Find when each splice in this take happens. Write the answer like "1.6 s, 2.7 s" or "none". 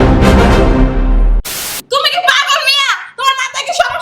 1.8 s

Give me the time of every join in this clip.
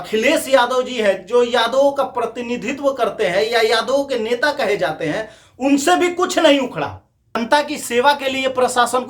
7.4 s

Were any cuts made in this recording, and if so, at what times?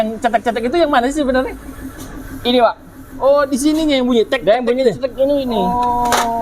none

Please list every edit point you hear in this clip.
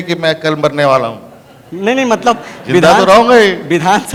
none

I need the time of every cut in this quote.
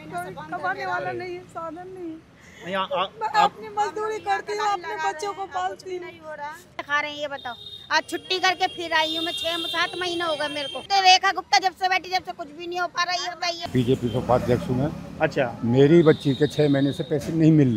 6.8 s, 10.8 s, 13.6 s

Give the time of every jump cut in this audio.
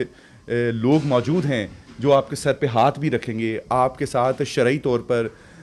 none

